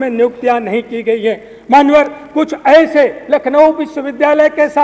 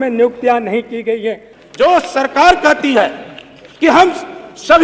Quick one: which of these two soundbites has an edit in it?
second; 1 cut; at 1.5 s

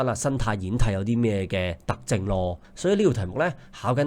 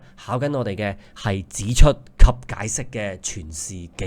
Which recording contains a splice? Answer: first; 1 cut; at 2.6 s

